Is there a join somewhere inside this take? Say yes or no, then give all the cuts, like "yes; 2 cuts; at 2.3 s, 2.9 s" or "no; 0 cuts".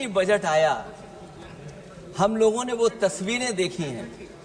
no; 0 cuts